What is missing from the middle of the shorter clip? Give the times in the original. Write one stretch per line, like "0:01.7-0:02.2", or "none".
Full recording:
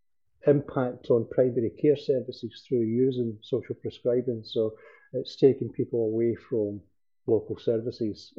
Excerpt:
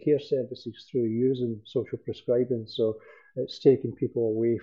none

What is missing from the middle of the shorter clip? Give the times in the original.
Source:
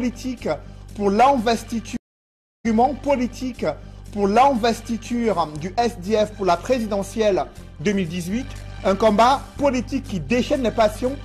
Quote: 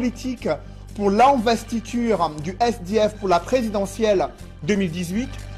0:01.7-0:04.9

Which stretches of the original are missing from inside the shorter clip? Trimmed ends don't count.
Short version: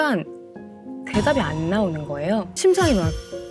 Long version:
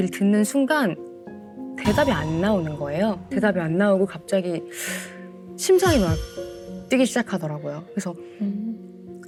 0:03.2-0:05.6

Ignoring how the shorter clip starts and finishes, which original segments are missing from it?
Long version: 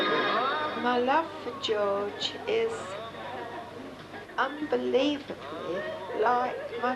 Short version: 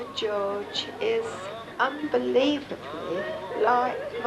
0:03.1-0:04.2

